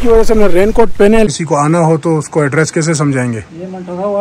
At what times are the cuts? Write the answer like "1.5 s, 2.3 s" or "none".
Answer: 1.3 s